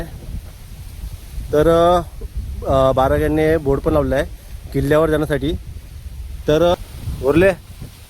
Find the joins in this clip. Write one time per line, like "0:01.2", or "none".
0:06.7